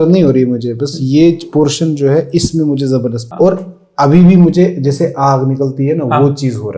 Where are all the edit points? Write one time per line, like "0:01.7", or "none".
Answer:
0:03.2